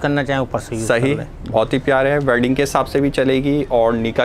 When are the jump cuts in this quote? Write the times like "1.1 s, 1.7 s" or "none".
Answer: none